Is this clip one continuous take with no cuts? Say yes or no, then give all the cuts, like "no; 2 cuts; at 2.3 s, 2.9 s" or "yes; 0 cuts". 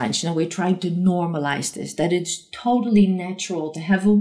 yes; 0 cuts